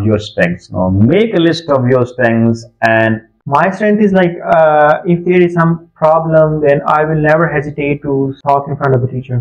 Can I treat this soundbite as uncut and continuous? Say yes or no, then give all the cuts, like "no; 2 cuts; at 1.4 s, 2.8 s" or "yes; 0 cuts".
no; 1 cut; at 3.3 s